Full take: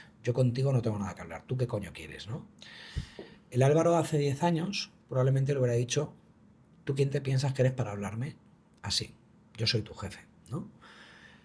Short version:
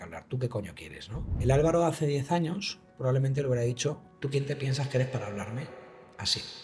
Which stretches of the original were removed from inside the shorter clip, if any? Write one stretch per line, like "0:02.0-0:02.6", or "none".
0:02.5-0:03.4
0:06.2-0:06.7

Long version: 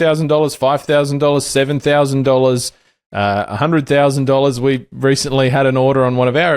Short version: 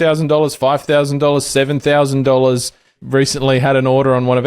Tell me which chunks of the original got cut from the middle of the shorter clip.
0:03.0-0:04.9

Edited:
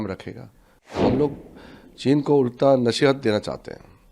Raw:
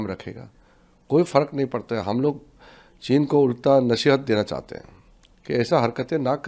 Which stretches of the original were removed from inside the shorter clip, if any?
0:01.0-0:02.0

